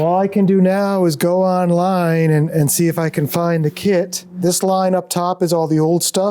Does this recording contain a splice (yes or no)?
yes